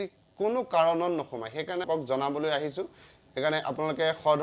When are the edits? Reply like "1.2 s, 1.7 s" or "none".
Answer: 1.8 s